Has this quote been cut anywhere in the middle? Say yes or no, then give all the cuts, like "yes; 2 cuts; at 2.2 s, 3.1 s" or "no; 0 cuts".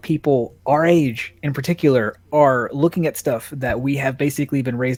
no; 0 cuts